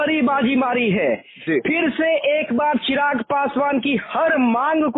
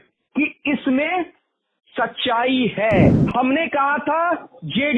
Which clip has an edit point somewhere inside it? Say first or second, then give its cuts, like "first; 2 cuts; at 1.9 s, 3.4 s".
second; 1 cut; at 3.2 s